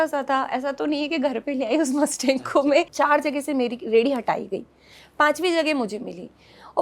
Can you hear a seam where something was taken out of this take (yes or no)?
yes